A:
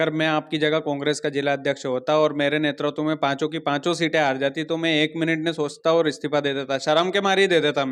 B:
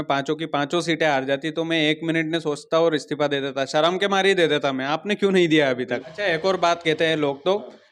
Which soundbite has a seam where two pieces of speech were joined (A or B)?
B